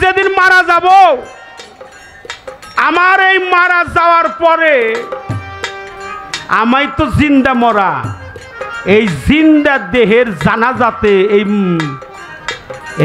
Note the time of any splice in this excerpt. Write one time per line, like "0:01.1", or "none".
none